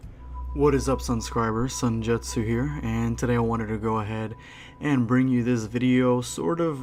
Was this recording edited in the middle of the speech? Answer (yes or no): no